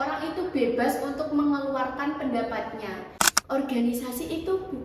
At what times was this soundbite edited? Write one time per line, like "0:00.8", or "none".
0:03.2